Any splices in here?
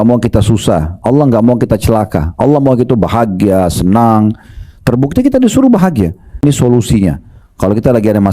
yes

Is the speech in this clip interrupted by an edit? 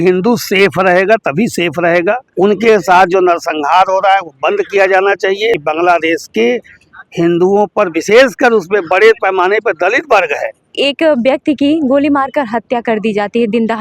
yes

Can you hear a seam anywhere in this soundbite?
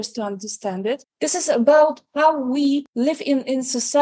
yes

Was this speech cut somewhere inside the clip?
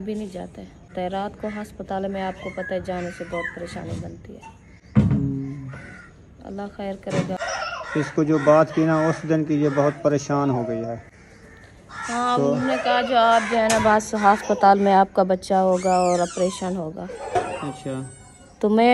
yes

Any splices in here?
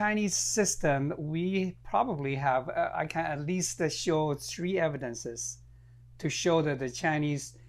no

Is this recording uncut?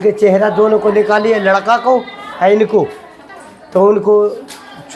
yes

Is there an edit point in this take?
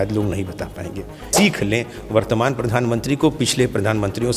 yes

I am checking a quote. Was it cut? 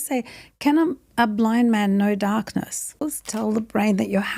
yes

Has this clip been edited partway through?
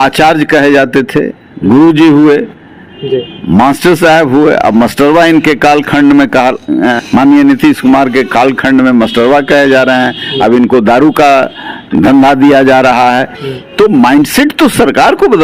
yes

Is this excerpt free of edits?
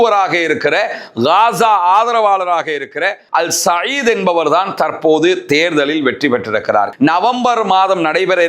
no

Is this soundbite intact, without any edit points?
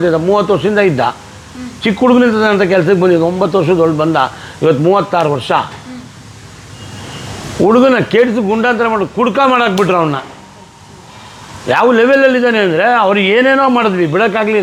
yes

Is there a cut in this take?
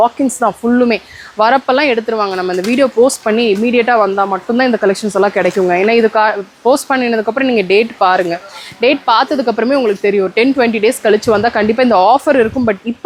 no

